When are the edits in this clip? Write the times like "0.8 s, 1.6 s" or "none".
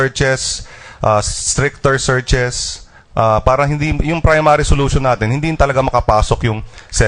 5.4 s